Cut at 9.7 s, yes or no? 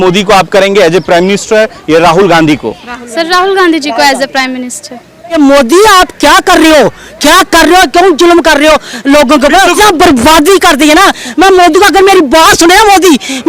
yes